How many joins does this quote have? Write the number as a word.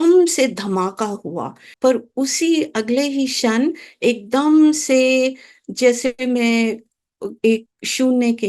one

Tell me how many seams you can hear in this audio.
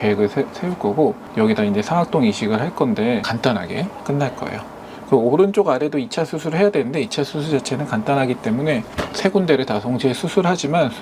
one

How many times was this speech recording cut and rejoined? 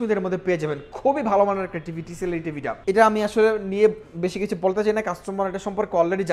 one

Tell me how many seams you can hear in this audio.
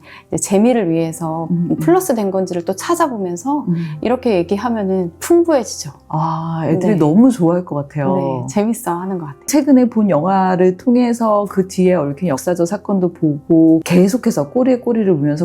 two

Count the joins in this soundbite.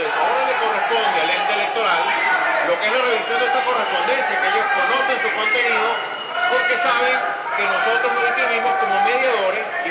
one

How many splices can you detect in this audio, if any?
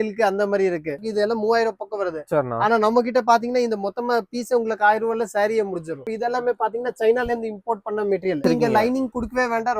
three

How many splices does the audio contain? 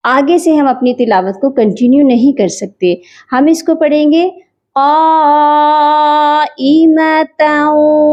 zero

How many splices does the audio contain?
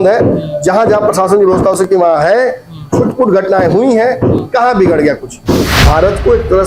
one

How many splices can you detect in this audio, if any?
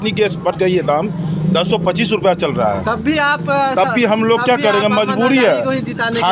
zero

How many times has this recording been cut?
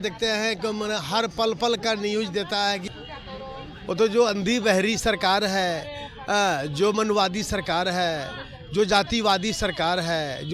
one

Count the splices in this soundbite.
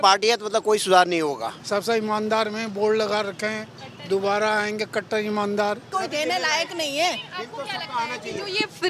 two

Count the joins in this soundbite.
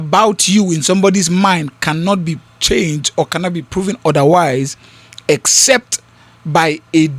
zero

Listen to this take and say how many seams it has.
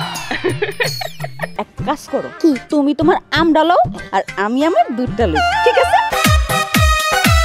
two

